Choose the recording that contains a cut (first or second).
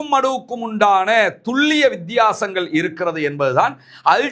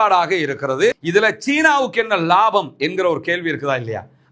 second